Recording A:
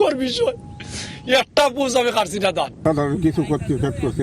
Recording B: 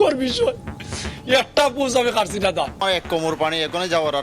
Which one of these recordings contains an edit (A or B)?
B